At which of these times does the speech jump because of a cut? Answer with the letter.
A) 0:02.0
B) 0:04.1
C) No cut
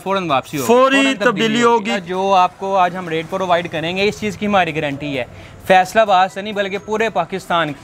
A